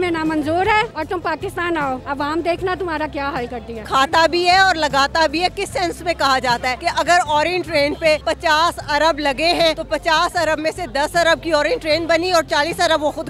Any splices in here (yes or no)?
yes